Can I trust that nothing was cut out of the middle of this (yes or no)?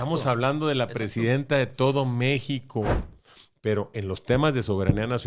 no